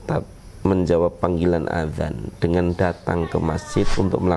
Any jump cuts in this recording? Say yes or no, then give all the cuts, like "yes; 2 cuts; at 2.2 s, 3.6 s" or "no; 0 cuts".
no; 0 cuts